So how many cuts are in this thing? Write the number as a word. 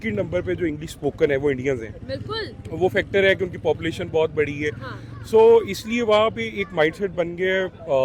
zero